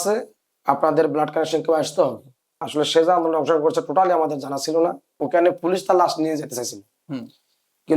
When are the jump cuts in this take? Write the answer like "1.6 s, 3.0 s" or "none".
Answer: 2.7 s, 5.2 s